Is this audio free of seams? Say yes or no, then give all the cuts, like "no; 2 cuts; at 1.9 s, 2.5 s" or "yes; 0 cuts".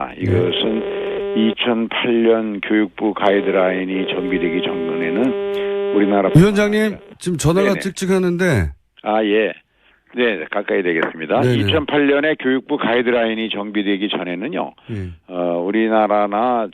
no; 1 cut; at 7.5 s